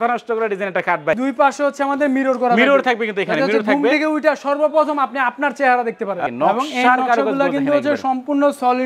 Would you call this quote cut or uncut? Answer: cut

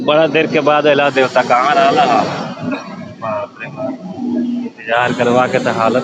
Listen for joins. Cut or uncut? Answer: uncut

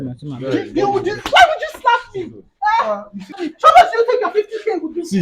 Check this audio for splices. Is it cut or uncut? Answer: cut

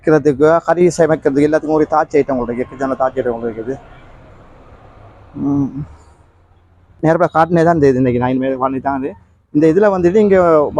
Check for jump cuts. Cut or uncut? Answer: uncut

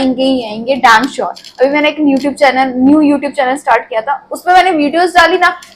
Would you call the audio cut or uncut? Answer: uncut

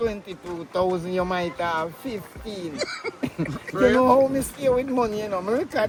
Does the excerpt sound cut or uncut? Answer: uncut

